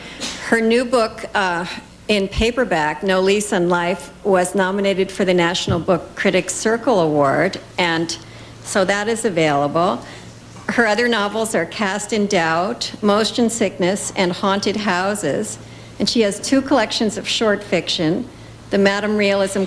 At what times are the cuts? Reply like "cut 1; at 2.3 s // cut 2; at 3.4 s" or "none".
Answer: cut 1; at 12.3 s